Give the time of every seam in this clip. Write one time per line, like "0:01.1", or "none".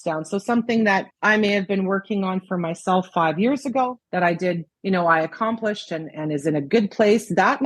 0:01.1
0:04.0
0:04.7